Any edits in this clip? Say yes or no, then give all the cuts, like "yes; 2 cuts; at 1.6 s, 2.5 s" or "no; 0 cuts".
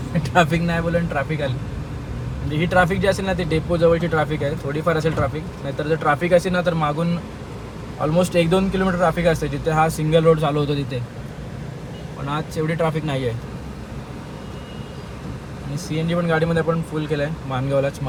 no; 0 cuts